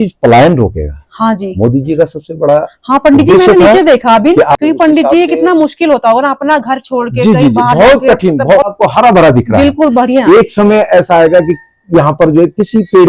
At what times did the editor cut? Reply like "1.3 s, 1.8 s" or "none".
4.5 s, 8.7 s